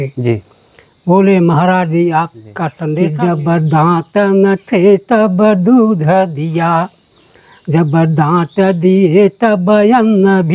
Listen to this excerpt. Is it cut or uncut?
cut